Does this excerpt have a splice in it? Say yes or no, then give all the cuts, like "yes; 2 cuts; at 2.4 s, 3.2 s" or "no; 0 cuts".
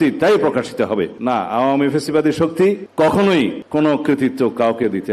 yes; 3 cuts; at 1.1 s, 2.9 s, 3.6 s